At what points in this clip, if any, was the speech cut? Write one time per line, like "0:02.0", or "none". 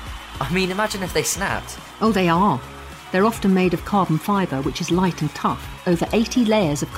none